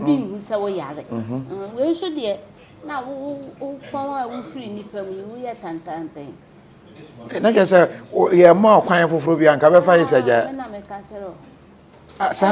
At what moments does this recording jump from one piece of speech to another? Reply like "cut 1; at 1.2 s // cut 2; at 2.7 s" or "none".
none